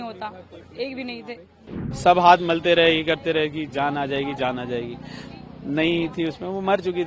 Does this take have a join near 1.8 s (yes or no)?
yes